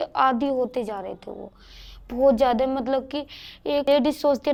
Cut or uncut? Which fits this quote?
uncut